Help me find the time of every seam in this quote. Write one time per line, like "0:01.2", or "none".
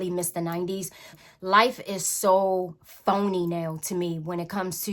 0:01.2

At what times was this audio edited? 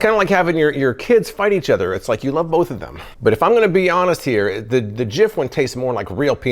none

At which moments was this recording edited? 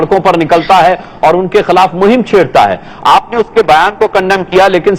0:01.1

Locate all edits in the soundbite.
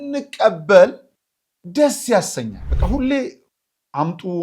0:02.7

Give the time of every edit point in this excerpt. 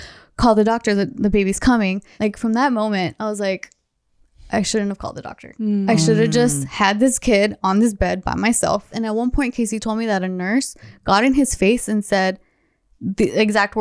0:02.1
0:08.9

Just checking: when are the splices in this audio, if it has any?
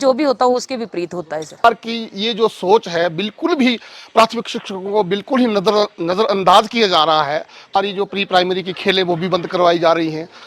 0:01.6
0:07.7

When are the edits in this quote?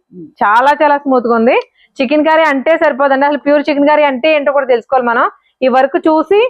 0:01.8

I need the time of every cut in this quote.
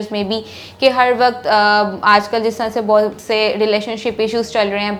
none

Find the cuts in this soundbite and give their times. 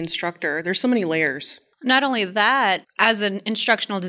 0:02.9

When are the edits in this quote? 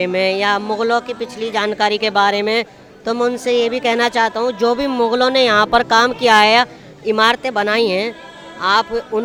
none

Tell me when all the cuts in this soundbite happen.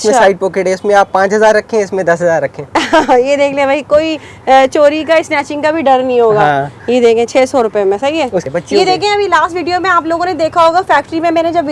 0:08.4

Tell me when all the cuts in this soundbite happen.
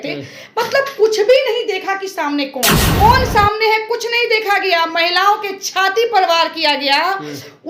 0:02.9

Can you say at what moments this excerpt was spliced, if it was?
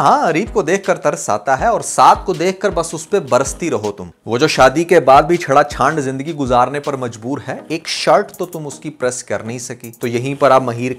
0:09.8

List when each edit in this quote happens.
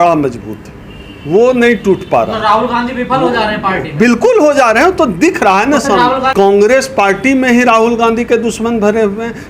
0:06.3

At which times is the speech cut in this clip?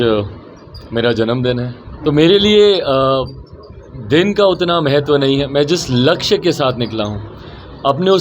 0:01.8

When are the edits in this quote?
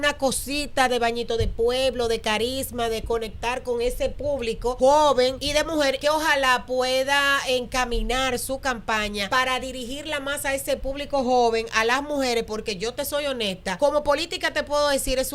0:04.8
0:05.6
0:09.3
0:13.8

